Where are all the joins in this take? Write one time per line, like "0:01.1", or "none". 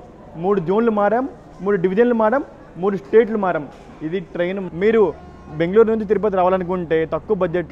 0:04.6